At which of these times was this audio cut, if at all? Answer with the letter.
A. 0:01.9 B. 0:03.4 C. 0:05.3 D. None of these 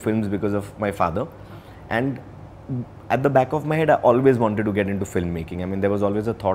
D